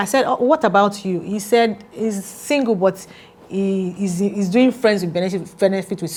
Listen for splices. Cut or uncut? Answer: uncut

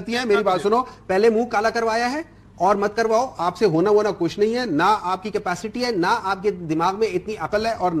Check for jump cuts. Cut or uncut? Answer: uncut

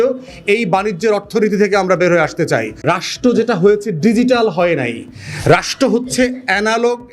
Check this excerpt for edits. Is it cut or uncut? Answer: cut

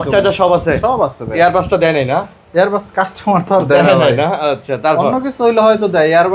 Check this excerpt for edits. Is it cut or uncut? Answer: uncut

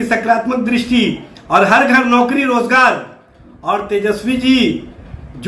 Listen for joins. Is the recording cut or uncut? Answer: uncut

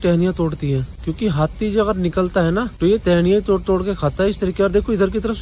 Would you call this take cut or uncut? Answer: cut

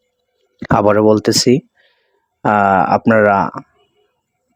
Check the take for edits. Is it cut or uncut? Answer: uncut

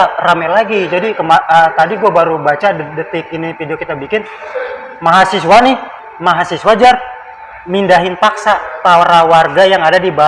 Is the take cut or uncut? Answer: uncut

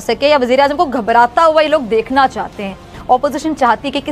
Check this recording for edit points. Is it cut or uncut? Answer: cut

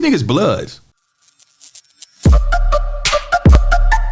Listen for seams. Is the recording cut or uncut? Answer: cut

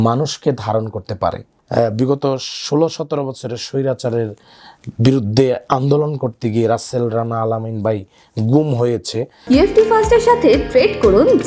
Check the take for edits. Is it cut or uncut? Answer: cut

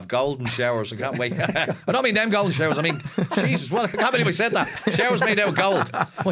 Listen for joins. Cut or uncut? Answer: uncut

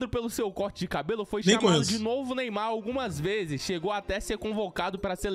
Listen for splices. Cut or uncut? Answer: uncut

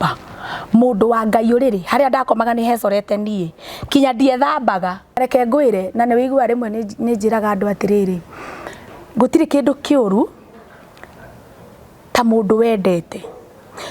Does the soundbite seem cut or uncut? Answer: cut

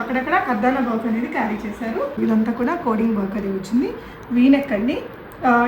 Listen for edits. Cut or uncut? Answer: cut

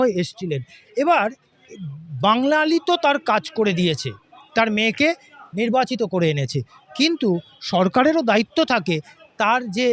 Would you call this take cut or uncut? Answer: uncut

